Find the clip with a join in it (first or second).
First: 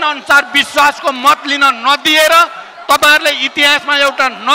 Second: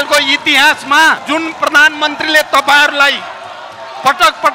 second